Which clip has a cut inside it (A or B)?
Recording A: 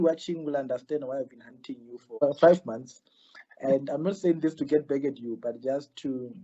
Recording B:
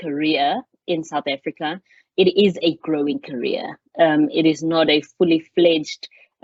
A